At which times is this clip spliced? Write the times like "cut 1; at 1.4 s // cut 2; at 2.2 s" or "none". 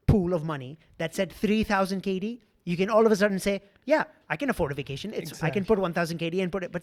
none